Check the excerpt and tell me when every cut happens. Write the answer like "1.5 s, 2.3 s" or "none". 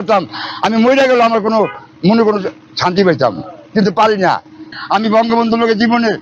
4.7 s